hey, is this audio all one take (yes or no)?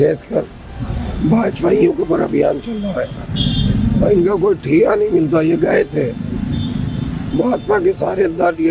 yes